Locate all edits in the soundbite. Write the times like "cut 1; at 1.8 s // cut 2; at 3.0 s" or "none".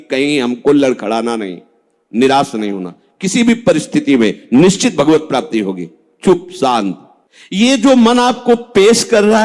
cut 1; at 7.0 s

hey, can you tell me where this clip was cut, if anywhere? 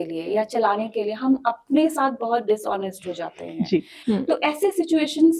cut 1; at 3.9 s

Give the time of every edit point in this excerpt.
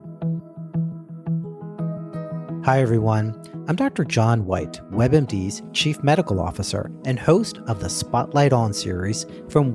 cut 1; at 2.6 s

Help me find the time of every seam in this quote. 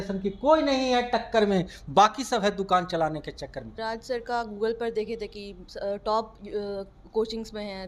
cut 1; at 3.7 s

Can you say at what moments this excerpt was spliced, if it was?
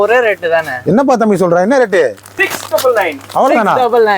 cut 1; at 2.3 s

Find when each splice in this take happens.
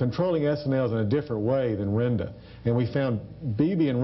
none

